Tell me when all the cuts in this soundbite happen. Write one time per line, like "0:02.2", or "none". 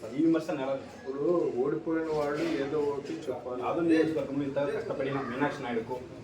0:00.9
0:03.5